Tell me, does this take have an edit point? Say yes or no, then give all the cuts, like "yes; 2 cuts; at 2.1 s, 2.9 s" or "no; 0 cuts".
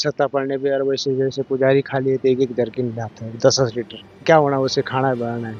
no; 0 cuts